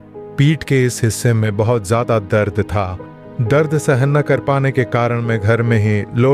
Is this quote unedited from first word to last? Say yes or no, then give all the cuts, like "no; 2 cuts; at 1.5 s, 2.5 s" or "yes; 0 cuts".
yes; 0 cuts